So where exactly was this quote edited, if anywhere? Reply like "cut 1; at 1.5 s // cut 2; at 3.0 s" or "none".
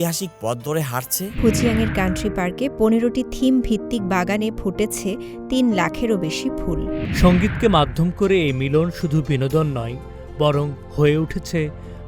cut 1; at 1.3 s // cut 2; at 7.0 s